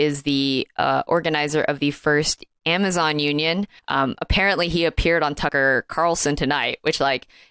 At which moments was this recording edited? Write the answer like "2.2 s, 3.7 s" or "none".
3.8 s, 5.5 s